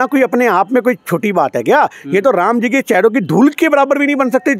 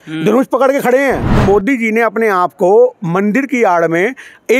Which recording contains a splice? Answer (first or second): second